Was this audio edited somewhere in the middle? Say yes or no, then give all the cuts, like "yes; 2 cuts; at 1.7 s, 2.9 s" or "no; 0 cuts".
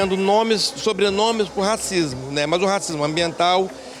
no; 0 cuts